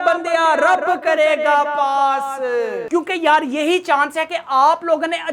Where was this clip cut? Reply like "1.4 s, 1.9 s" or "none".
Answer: 2.8 s